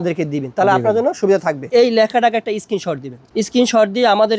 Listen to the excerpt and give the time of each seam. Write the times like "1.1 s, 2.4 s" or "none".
1.6 s, 3.1 s